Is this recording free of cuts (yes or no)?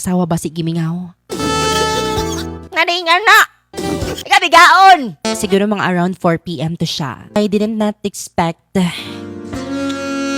no